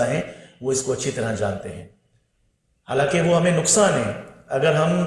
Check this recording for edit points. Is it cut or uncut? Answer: uncut